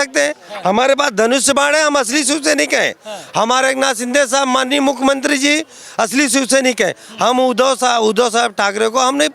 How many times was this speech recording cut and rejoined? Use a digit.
0